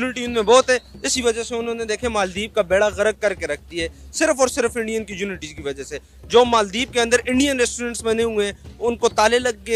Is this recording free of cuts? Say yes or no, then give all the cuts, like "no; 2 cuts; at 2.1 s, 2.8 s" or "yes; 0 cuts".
yes; 0 cuts